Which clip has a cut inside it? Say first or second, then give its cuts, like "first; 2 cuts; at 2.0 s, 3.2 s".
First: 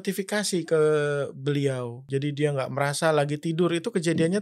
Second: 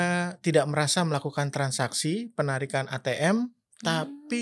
first; 1 cut; at 2.0 s